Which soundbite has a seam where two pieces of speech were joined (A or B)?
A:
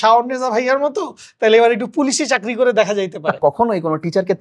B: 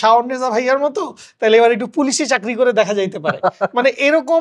A